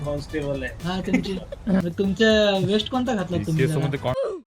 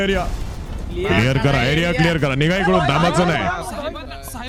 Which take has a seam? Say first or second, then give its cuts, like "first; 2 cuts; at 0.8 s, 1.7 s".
first; 1 cut; at 1.8 s